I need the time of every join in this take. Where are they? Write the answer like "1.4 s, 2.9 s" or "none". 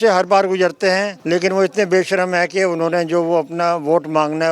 1.1 s